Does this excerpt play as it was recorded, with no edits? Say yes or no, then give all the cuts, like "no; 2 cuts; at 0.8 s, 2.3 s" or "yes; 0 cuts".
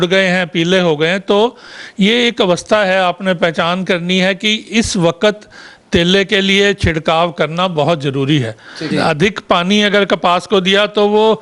no; 1 cut; at 8.8 s